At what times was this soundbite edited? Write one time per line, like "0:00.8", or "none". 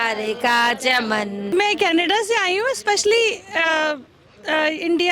0:01.5

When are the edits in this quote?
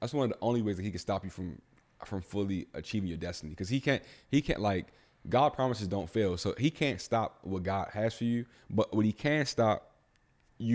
none

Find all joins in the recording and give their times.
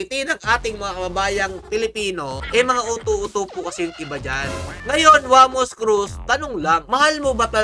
0:02.4
0:04.8

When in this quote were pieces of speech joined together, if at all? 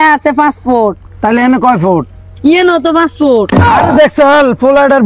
none

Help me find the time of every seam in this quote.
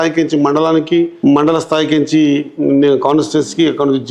0:01.1

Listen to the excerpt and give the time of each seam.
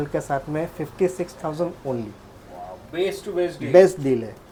none

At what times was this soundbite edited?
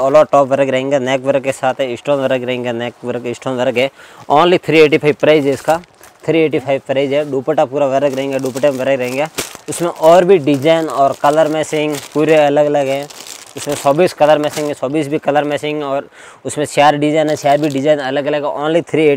none

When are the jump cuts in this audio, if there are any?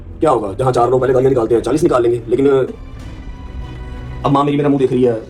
0:02.7

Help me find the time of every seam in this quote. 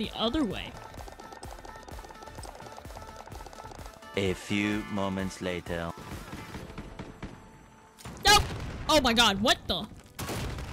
0:06.1

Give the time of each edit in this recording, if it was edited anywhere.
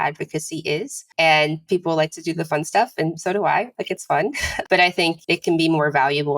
0:01.0
0:04.5
0:05.2

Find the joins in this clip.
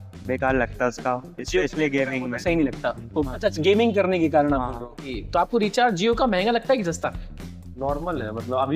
0:05.2

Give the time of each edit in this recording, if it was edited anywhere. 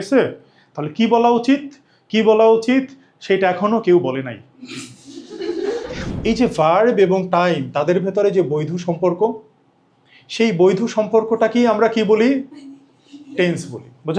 0:06.0

